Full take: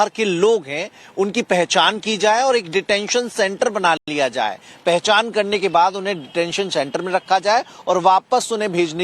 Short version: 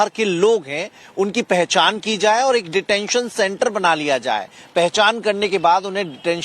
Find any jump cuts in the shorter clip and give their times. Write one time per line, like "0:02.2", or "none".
0:04.0

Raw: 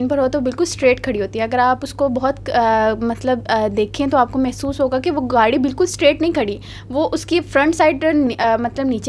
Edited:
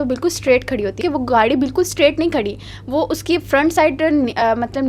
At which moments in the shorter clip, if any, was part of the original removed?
0:01.0

